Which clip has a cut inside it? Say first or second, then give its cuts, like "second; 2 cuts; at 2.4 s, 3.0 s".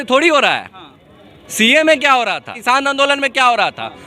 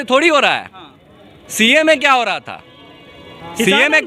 first; 1 cut; at 2.5 s